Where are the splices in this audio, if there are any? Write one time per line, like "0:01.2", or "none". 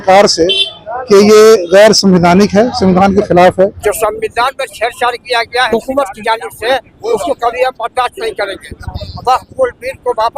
0:03.8
0:05.7